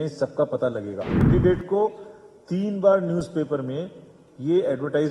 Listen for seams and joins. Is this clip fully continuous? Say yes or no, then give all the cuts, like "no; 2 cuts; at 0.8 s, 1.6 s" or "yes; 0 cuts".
no; 1 cut; at 1.2 s